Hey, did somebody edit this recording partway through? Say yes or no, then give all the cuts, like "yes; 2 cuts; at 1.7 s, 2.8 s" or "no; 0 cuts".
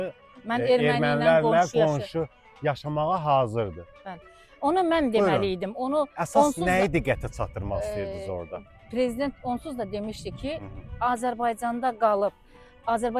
no; 0 cuts